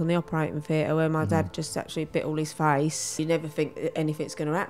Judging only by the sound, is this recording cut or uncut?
cut